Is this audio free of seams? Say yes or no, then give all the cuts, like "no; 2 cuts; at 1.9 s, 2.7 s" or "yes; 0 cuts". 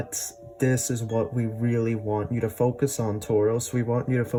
yes; 0 cuts